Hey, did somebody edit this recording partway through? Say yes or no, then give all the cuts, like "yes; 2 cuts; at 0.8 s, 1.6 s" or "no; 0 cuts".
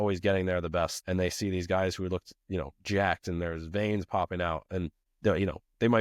yes; 2 cuts; at 1.0 s, 5.0 s